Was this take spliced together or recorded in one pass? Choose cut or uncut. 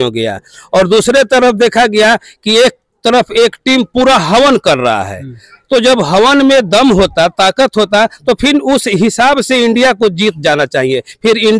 uncut